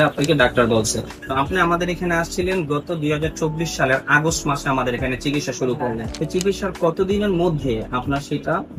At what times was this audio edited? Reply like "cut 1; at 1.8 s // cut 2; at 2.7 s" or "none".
cut 1; at 1.2 s // cut 2; at 6.1 s

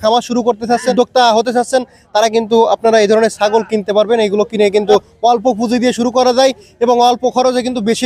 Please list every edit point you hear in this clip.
cut 1; at 0.9 s // cut 2; at 5.1 s

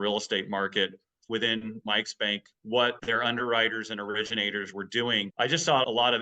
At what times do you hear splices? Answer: cut 1; at 1.2 s // cut 2; at 3.0 s // cut 3; at 5.3 s

